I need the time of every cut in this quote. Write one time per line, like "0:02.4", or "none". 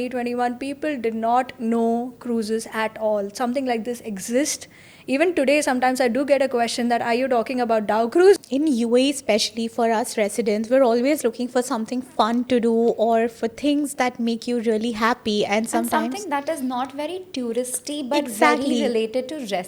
0:08.4

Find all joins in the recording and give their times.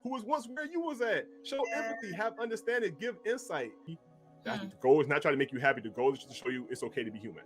0:03.9

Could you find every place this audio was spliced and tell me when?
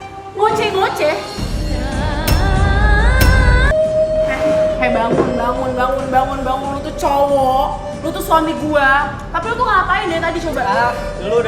0:03.7

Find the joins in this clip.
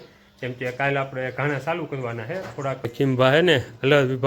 0:02.9

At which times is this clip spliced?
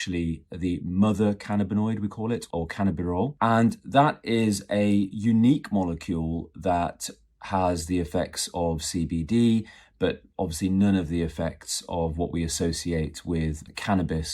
0:03.3

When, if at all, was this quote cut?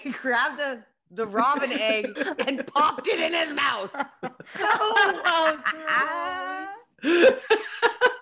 none

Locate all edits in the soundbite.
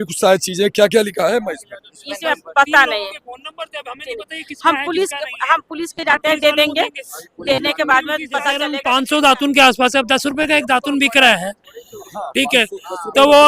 0:08.7

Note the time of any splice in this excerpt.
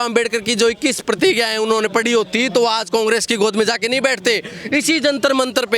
none

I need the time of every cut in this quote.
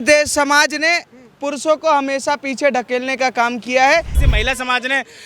0:04.2

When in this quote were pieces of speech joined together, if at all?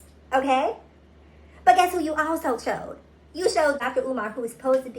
0:03.9

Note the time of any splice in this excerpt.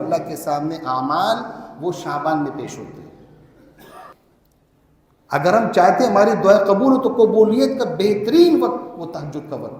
0:04.1

